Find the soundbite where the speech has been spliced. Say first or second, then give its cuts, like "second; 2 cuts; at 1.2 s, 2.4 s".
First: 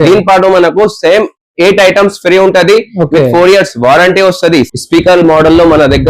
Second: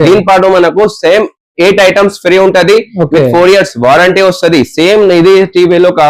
first; 1 cut; at 4.7 s